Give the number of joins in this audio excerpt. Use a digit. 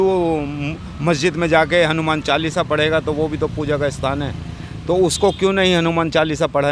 0